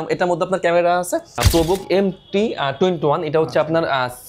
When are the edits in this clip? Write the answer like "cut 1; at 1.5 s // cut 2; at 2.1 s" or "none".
cut 1; at 1.4 s